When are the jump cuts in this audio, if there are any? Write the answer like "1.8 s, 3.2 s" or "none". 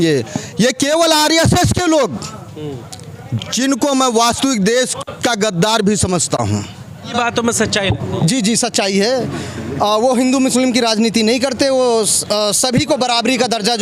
7.1 s